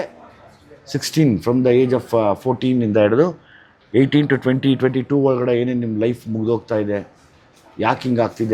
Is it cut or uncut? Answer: uncut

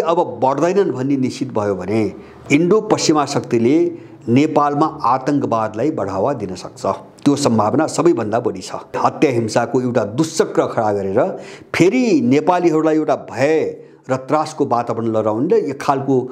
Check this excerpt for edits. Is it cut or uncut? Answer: cut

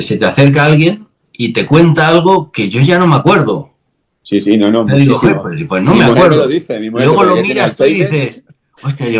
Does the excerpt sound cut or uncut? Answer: uncut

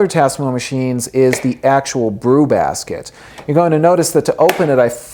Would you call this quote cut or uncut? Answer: uncut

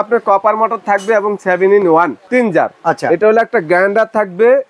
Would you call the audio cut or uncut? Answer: cut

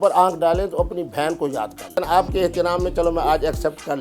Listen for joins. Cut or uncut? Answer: cut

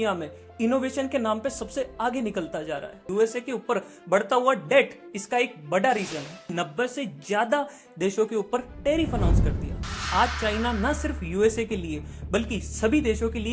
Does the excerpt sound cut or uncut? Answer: cut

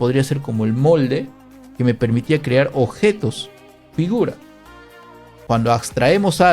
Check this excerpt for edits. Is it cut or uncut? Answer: cut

